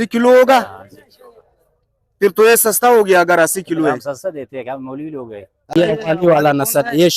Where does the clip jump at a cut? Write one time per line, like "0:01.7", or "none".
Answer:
0:05.7